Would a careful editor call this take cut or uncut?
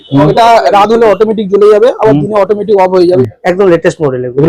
cut